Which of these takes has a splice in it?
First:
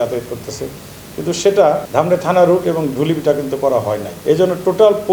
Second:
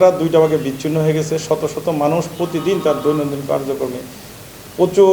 first; 2 cuts; at 1.9 s, 4.1 s

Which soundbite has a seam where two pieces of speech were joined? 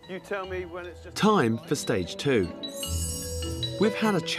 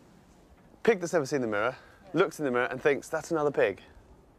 first; 1 cut; at 1.7 s

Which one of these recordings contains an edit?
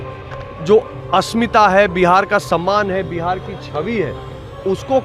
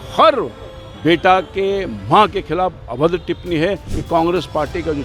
second; 1 cut; at 3.9 s

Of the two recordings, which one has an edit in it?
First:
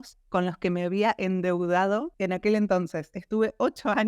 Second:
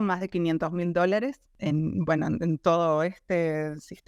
first; 1 cut; at 2.1 s

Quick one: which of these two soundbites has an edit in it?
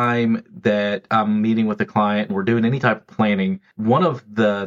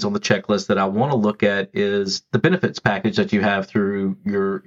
first; 2 cuts; at 1.0 s, 3.7 s

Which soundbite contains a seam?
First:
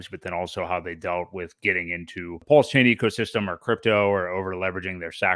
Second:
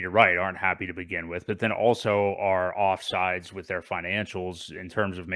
first; 1 cut; at 2.4 s

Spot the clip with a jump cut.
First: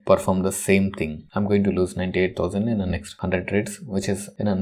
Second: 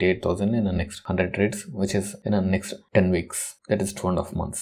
first; 1 cut; at 1.2 s

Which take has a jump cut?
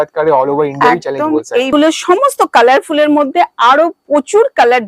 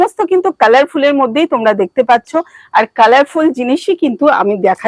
first; 1 cut; at 1.7 s

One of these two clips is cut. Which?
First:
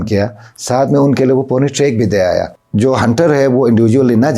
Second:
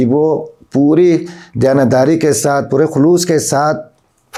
first; 1 cut; at 2.6 s

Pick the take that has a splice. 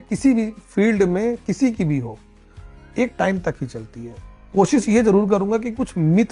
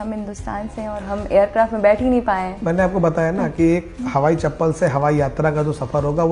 first; 1 cut; at 4.2 s

